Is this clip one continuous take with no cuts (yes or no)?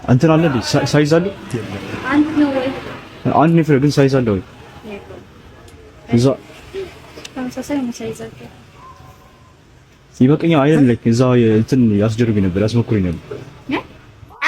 yes